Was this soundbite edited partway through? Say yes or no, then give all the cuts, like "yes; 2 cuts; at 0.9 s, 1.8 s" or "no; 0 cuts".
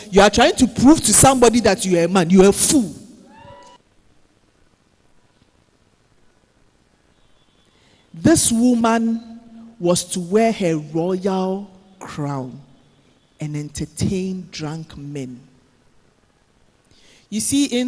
yes; 1 cut; at 3.8 s